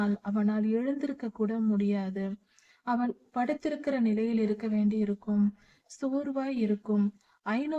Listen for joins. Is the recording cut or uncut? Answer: cut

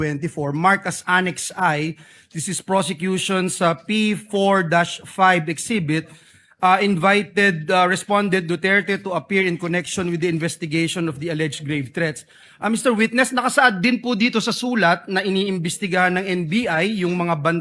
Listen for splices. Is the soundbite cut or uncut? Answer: uncut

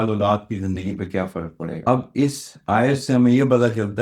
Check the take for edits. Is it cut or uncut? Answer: cut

